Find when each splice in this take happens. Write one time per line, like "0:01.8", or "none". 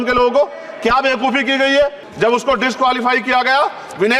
0:02.0